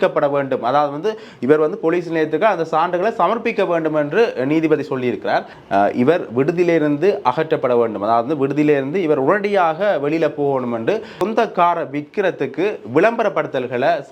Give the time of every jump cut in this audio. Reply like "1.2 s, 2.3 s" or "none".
5.5 s, 11.2 s